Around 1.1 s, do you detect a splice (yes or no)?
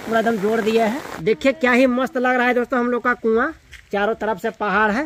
yes